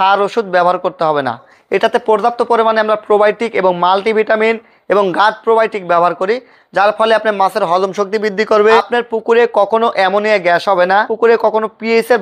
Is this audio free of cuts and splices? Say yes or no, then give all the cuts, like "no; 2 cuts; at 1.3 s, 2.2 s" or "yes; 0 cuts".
no; 3 cuts; at 1.5 s, 8.8 s, 11.1 s